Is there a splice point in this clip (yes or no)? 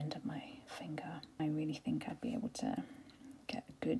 yes